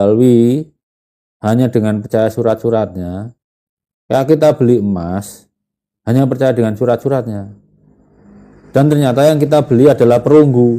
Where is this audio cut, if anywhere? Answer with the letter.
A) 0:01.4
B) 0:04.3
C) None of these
C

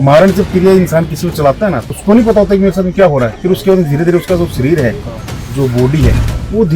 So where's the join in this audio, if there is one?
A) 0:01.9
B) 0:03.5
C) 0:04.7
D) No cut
A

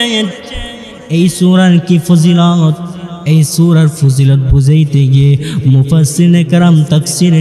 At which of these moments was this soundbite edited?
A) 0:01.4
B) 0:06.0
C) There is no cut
C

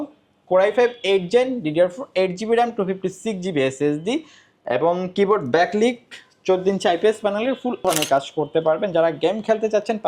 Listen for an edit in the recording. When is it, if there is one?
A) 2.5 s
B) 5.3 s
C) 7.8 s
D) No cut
C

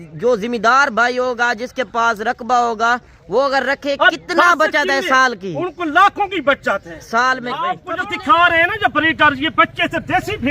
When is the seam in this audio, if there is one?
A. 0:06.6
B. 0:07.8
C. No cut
B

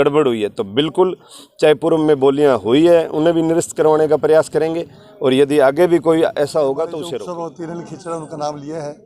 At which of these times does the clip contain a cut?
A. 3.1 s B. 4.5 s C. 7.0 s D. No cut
C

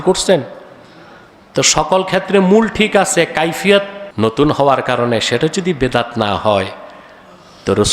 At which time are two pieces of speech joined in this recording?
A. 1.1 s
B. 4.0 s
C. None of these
B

